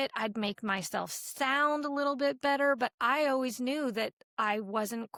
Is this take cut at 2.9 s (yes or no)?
no